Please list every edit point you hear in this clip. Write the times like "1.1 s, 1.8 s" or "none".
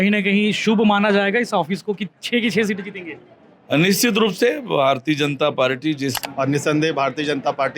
6.2 s